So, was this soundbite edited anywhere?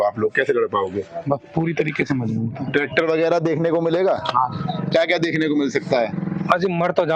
no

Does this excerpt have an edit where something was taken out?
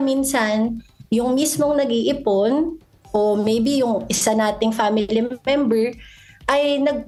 no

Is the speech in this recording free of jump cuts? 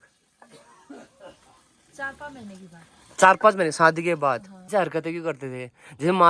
no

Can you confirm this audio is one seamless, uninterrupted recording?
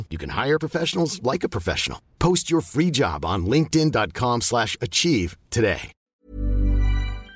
no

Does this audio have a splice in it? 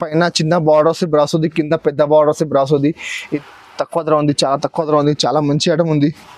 yes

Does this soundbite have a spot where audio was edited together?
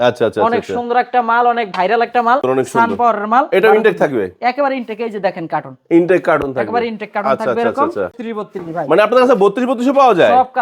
yes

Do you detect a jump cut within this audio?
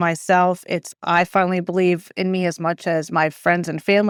no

